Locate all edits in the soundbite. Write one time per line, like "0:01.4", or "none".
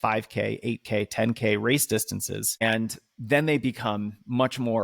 0:02.6